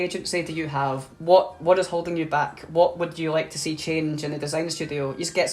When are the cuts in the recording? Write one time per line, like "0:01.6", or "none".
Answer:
0:01.0